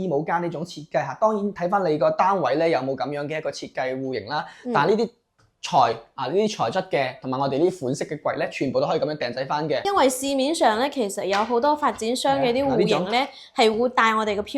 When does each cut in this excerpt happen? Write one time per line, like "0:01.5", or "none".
0:09.8